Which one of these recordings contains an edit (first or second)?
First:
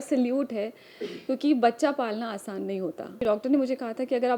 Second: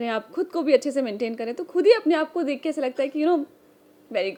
first